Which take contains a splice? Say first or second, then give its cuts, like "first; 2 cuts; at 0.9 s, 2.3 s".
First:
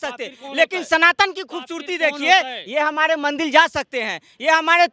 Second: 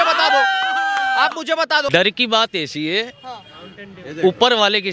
second; 1 cut; at 1.9 s